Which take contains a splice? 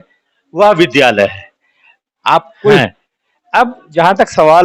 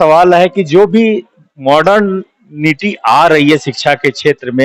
first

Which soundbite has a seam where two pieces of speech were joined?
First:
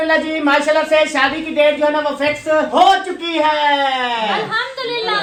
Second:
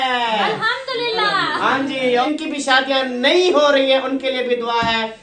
second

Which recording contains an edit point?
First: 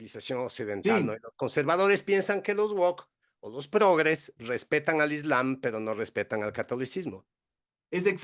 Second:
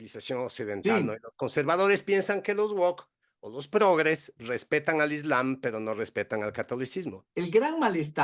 second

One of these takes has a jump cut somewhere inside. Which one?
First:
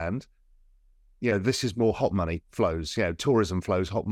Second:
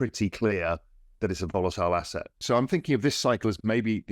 second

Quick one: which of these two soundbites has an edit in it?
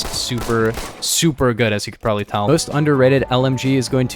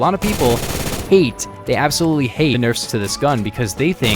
first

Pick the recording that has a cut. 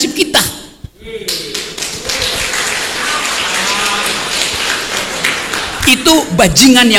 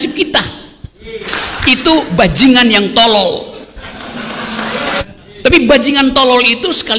second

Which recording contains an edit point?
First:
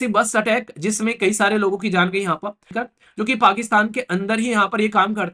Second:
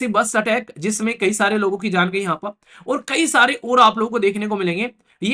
first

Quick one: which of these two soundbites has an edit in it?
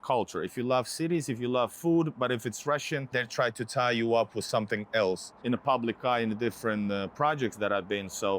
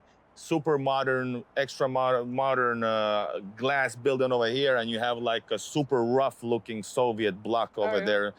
first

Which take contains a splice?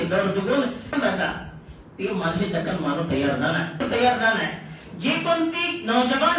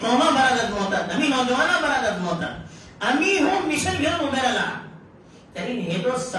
first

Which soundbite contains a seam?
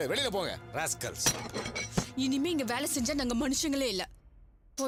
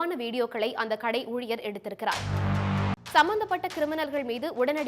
second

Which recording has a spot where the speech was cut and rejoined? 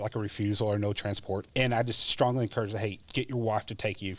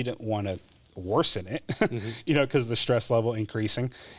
first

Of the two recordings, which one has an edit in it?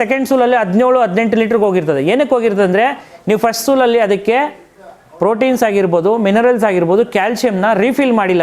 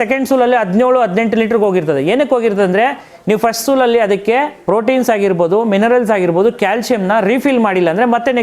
second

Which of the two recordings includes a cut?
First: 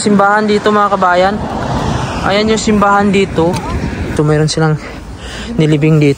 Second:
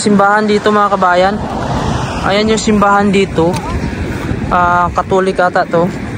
first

